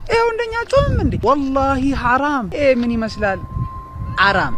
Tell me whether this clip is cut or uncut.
cut